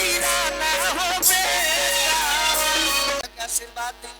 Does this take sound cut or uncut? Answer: cut